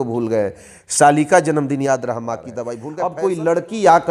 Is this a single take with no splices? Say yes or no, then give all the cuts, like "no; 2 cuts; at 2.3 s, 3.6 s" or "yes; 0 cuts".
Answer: no; 1 cut; at 2.8 s